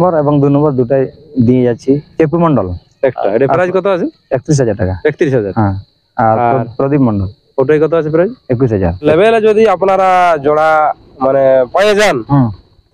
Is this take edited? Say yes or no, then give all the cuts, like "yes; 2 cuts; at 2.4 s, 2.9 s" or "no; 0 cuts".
yes; 2 cuts; at 2.1 s, 9.0 s